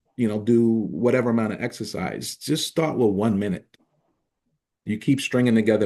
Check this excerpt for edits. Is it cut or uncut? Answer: uncut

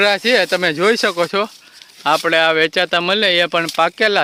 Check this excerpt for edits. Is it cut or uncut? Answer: uncut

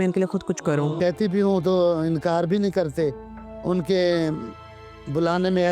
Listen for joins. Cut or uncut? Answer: cut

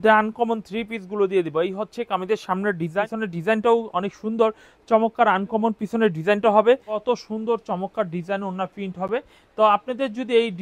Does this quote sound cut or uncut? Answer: cut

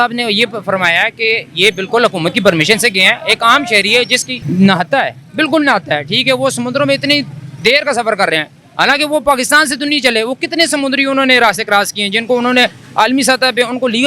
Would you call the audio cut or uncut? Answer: cut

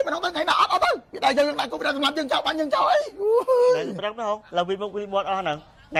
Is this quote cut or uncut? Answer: uncut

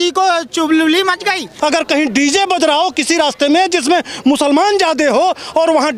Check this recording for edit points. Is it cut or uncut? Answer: cut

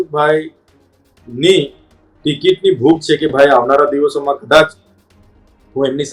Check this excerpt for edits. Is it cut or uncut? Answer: uncut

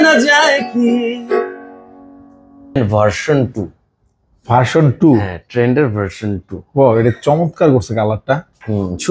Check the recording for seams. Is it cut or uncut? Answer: cut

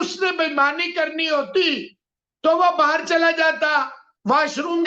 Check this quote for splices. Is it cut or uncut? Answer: uncut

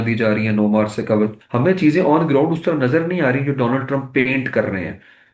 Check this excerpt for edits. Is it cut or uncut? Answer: cut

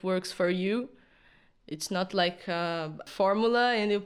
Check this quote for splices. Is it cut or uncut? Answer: cut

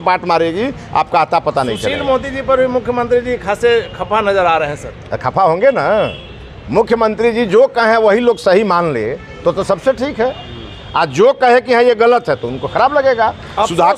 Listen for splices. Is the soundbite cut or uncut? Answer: uncut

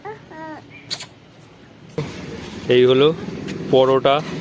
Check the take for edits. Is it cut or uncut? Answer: cut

